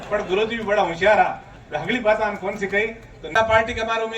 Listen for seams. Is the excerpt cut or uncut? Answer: cut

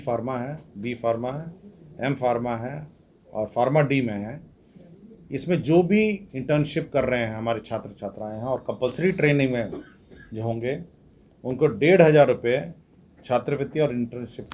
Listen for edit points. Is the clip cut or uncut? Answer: uncut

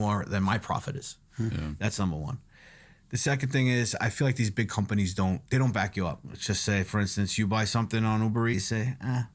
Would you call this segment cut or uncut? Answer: cut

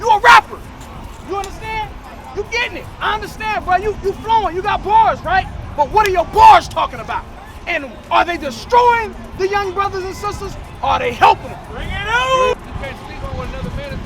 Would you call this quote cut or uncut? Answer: cut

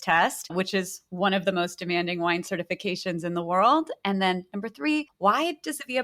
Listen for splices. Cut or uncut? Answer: uncut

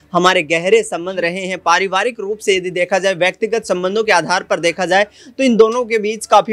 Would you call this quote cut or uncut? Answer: uncut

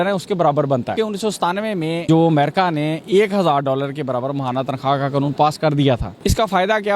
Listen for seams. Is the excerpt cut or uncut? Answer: cut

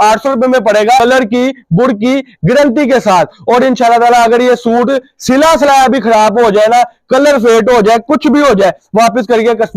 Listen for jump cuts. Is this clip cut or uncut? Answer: cut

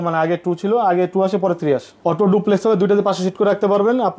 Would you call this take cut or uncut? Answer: cut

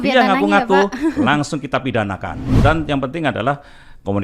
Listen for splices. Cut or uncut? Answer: cut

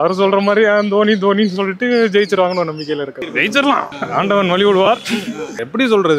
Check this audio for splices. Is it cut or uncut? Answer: uncut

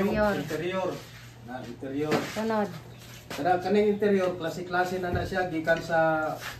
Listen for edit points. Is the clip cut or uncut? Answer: uncut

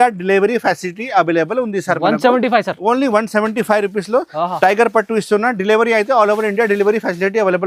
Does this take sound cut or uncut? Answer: uncut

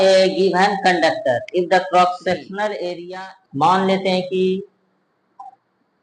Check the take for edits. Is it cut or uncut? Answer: cut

